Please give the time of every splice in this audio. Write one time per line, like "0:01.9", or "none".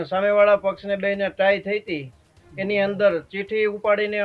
none